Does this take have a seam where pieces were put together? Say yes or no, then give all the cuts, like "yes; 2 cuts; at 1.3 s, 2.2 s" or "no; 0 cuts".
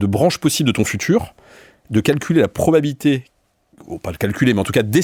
no; 0 cuts